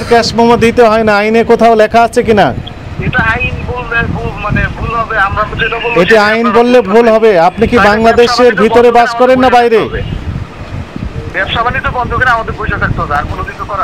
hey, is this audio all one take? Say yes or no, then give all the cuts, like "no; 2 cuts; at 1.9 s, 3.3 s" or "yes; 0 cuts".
yes; 0 cuts